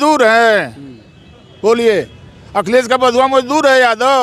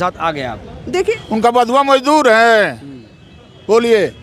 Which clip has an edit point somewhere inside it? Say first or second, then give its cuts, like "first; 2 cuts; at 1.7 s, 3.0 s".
second; 1 cut; at 1.1 s